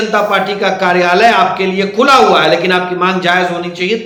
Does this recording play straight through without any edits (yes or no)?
yes